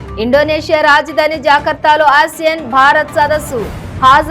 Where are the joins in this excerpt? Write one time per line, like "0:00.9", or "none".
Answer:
none